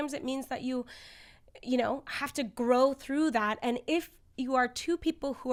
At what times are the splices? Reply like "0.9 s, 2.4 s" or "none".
none